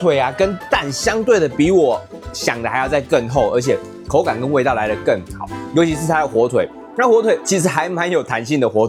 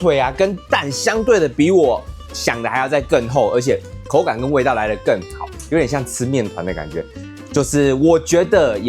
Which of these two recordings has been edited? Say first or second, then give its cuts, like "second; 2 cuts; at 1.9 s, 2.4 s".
second; 1 cut; at 5.5 s